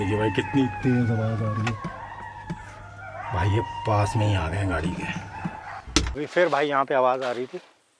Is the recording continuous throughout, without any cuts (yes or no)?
no